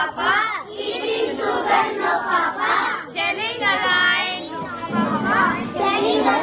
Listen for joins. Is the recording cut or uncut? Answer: uncut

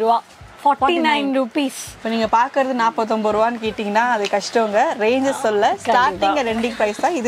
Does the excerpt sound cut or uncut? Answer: cut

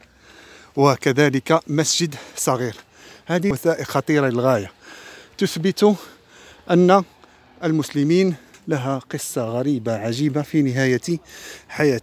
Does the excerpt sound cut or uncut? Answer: cut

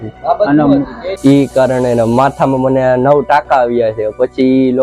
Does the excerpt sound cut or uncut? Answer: cut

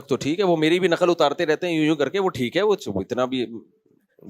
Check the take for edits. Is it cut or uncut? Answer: uncut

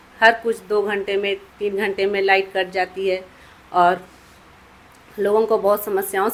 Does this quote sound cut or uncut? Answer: uncut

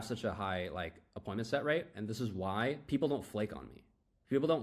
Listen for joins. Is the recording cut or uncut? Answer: cut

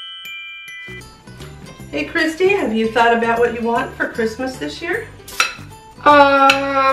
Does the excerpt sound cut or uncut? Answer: cut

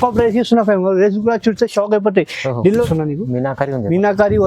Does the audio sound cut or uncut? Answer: cut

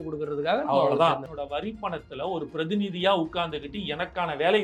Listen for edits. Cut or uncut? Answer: cut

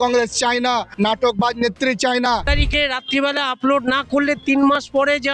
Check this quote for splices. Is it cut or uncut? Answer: cut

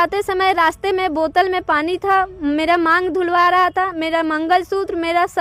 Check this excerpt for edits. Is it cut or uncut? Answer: uncut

